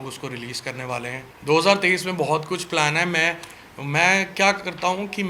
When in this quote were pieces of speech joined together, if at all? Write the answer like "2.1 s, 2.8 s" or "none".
1.3 s